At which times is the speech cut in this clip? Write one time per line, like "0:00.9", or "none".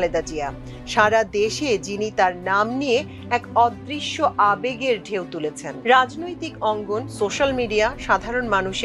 0:05.7